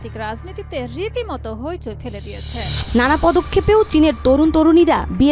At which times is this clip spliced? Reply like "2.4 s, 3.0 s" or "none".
2.8 s